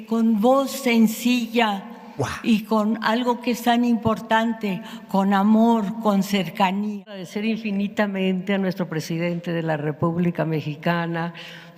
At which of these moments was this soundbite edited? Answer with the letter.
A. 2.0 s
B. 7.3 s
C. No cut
B